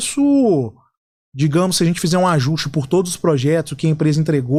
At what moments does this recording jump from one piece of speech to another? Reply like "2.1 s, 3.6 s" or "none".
none